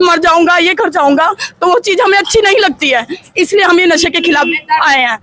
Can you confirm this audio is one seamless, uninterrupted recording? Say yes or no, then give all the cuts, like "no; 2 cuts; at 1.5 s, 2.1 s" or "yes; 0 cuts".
yes; 0 cuts